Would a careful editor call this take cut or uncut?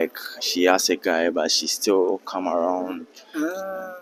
uncut